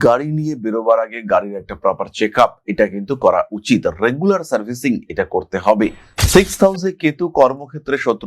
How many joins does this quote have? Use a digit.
1